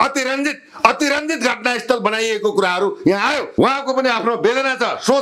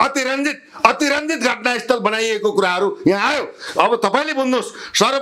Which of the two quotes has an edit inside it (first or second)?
first